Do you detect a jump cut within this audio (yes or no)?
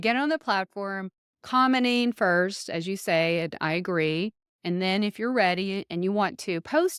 no